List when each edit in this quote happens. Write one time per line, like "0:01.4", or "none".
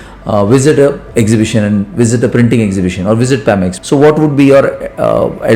0:03.7